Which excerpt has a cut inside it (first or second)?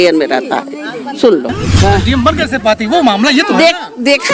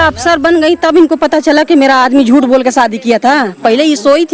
first